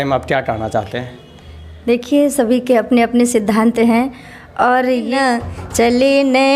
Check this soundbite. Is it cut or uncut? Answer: cut